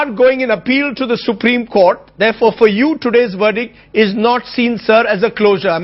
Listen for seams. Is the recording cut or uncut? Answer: cut